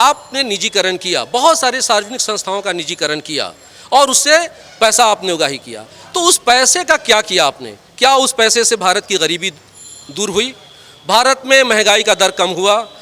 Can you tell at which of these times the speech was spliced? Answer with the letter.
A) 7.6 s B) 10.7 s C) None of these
C